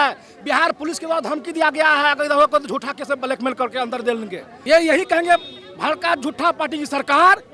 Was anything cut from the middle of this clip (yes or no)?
yes